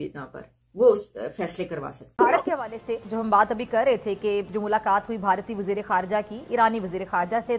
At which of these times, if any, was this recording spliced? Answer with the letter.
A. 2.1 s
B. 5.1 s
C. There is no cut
A